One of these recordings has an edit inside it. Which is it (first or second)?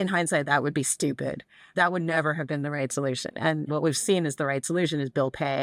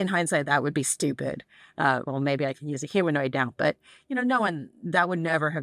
first